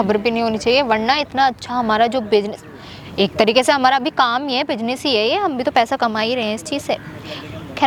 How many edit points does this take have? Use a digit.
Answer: 0